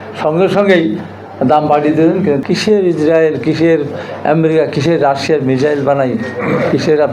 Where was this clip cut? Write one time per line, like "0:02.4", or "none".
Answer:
0:02.4